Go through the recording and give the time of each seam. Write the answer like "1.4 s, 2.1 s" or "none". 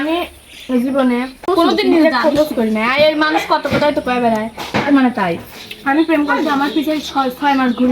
1.5 s